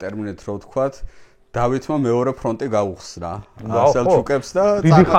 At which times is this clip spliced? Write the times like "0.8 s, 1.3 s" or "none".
none